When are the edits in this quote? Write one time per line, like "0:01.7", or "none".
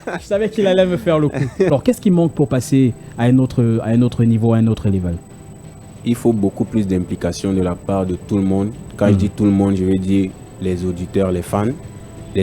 0:01.7